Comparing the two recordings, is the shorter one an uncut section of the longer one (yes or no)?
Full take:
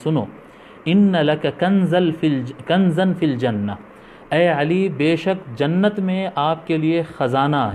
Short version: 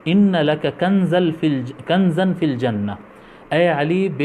yes